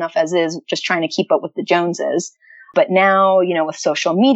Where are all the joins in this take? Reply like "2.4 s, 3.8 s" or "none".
2.7 s